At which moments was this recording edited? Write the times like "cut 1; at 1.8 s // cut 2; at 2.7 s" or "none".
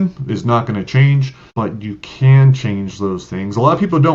cut 1; at 1.4 s